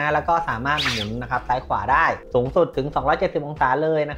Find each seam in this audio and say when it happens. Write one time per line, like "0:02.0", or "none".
none